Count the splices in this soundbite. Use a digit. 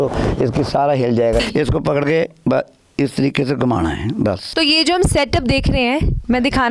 2